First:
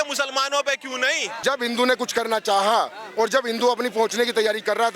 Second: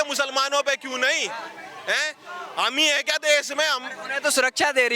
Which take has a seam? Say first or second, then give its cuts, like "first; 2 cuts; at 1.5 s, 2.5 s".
first; 1 cut; at 1.3 s